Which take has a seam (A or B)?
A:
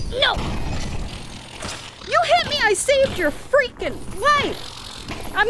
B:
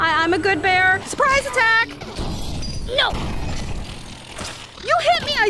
B